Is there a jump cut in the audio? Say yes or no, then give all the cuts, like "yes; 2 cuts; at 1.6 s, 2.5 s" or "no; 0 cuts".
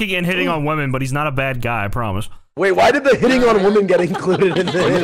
no; 0 cuts